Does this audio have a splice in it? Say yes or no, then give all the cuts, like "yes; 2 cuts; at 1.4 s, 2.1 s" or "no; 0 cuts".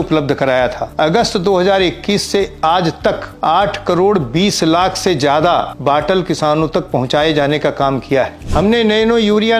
yes; 4 cuts; at 0.8 s, 3.3 s, 5.7 s, 8.4 s